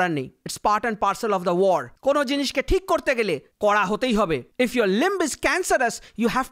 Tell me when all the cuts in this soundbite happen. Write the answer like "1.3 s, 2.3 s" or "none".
none